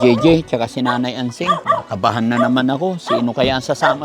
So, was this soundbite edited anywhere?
yes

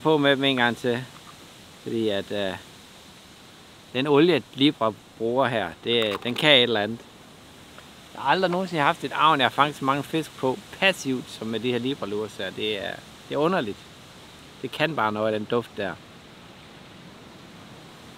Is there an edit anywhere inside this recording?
no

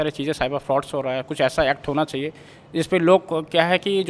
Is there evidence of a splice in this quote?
no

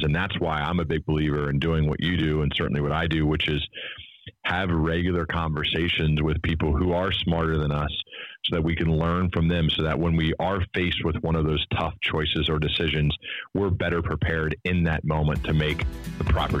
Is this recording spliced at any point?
no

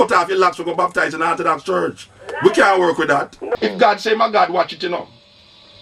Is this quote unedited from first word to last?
no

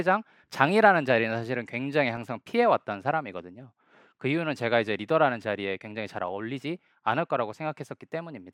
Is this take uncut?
yes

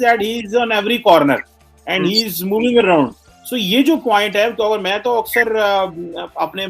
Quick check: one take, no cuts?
yes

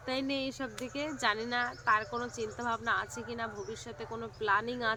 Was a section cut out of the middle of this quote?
no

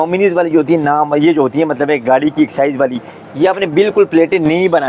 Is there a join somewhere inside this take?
no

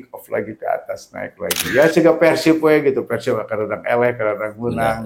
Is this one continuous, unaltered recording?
yes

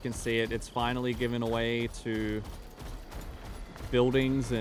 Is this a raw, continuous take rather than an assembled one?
yes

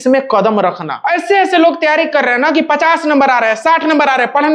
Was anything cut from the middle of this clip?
yes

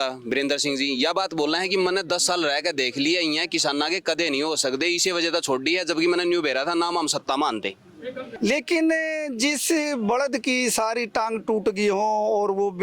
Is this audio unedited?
no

